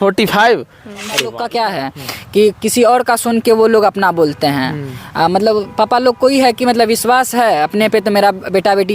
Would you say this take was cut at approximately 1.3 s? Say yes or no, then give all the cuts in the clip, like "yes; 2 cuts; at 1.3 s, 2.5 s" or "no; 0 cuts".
yes; 1 cut; at 1.3 s